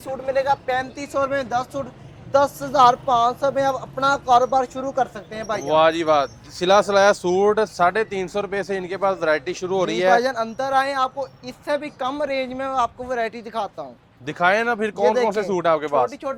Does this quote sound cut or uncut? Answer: uncut